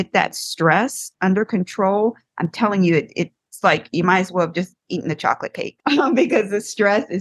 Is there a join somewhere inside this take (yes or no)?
yes